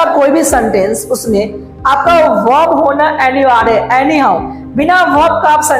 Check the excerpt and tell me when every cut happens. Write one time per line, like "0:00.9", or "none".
none